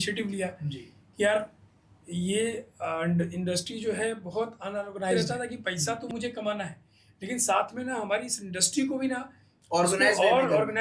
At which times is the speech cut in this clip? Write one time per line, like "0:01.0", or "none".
0:05.1